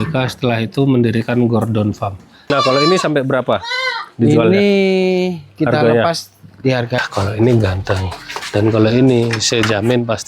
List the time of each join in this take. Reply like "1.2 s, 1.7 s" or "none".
2.5 s, 7.0 s